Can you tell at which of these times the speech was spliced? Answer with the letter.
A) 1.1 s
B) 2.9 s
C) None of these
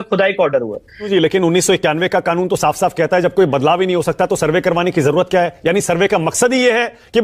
A